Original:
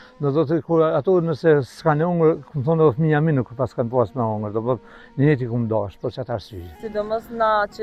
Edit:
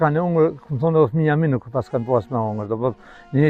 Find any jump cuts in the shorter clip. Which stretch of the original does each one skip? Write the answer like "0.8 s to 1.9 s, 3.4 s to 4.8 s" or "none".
none